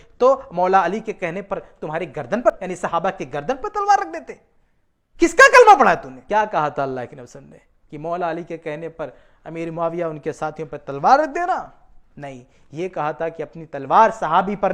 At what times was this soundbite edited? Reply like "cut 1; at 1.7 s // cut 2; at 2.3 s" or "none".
cut 1; at 2.5 s // cut 2; at 6.1 s